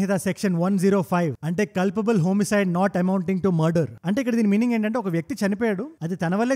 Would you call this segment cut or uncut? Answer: uncut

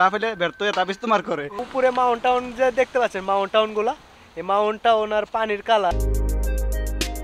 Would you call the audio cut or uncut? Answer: cut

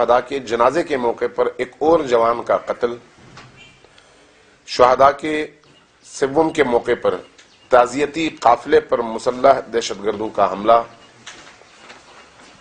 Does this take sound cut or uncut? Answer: uncut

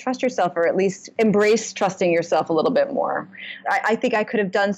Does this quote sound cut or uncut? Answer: cut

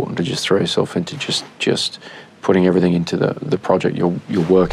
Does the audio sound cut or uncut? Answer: uncut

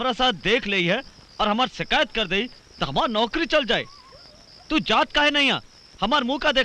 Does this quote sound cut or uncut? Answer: uncut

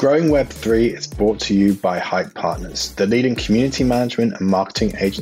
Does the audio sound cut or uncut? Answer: uncut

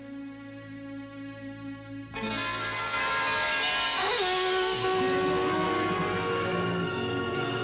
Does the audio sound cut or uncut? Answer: cut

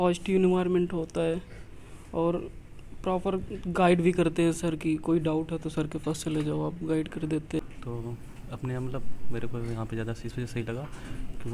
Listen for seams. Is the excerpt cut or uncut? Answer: cut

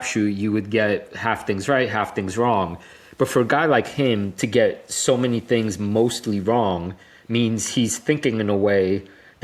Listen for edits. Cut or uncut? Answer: uncut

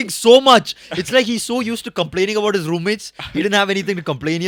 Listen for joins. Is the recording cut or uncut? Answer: uncut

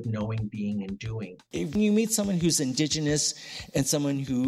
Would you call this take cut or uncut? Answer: cut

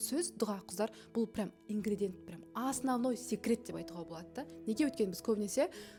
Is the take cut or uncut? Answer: uncut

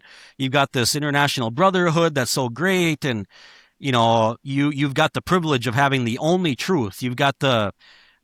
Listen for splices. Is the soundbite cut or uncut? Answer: uncut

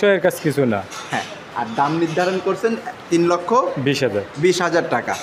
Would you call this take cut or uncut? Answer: uncut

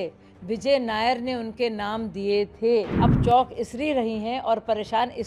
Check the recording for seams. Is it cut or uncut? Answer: cut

